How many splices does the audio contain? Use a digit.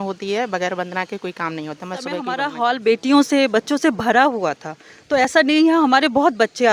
1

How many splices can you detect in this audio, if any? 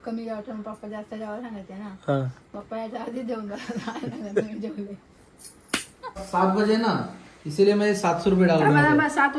1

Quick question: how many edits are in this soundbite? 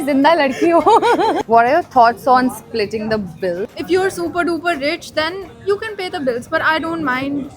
2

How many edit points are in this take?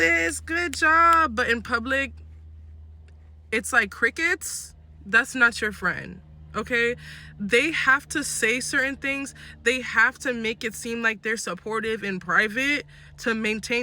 0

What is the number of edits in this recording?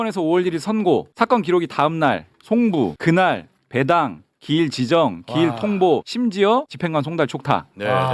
3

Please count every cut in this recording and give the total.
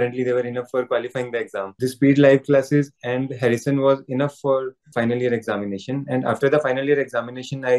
2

